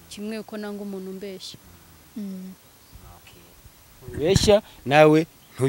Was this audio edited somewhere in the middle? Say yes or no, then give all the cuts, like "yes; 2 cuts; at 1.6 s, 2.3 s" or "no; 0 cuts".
no; 0 cuts